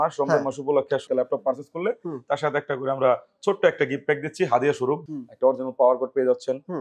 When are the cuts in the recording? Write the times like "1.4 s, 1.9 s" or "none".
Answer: 1.0 s, 5.0 s